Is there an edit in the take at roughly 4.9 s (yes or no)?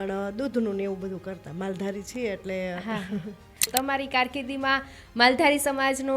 no